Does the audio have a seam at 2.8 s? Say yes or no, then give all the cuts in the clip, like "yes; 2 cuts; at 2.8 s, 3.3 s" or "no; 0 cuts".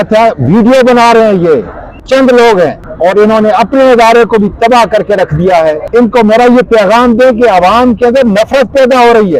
yes; 3 cuts; at 2.0 s, 2.8 s, 5.8 s